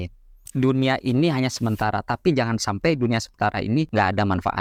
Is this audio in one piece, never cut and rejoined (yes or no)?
yes